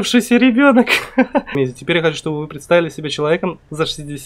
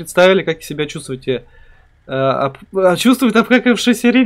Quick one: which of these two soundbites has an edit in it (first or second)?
first